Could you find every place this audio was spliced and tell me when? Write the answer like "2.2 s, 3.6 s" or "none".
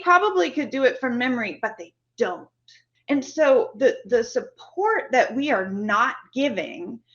2.9 s